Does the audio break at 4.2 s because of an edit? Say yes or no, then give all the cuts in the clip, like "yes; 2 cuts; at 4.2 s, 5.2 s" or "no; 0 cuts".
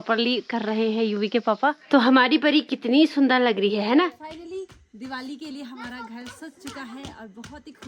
yes; 2 cuts; at 1.8 s, 4.2 s